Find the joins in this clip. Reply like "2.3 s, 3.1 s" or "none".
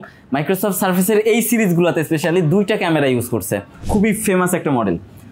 3.7 s